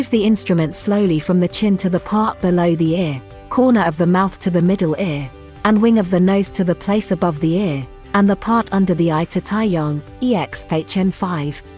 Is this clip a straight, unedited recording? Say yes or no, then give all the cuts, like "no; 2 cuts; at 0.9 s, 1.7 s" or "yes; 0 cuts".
yes; 0 cuts